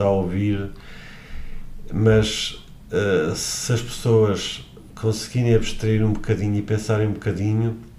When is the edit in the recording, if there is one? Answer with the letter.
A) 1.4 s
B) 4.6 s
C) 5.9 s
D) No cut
D